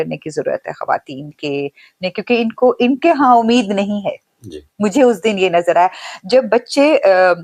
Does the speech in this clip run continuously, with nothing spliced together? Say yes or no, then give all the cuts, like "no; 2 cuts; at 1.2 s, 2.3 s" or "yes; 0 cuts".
yes; 0 cuts